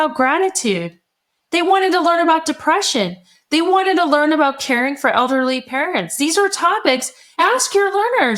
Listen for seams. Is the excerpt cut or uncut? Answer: uncut